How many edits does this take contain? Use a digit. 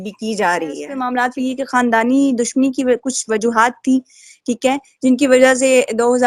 1